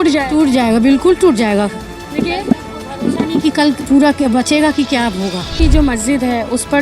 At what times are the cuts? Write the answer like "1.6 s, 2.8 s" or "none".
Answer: 5.5 s